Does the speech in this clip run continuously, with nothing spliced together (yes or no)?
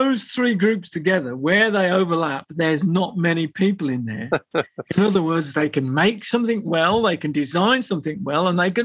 yes